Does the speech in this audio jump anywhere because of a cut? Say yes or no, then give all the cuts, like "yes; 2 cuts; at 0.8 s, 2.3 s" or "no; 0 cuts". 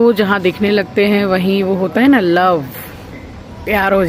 no; 0 cuts